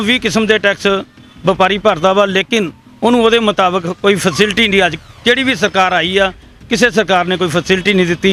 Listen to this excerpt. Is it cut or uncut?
uncut